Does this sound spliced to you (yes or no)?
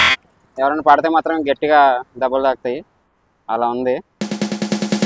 yes